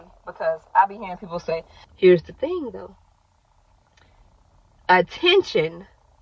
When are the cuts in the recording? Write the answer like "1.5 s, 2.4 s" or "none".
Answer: 1.8 s